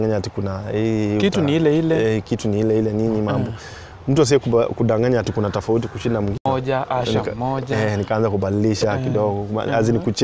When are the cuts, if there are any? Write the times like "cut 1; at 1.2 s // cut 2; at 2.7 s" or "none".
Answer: cut 1; at 6.4 s